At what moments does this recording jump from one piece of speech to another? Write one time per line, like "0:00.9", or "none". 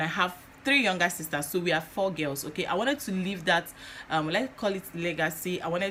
none